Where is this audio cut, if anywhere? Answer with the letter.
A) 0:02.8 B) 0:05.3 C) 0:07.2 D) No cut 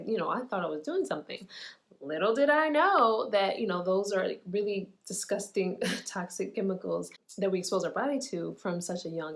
C